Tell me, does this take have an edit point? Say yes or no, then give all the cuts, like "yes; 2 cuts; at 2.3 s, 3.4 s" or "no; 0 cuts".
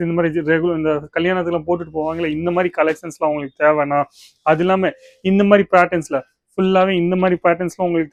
no; 0 cuts